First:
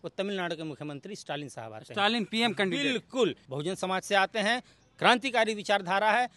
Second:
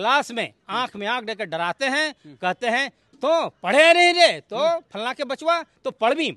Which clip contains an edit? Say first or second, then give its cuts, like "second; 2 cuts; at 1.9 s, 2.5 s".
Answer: first; 1 cut; at 3.4 s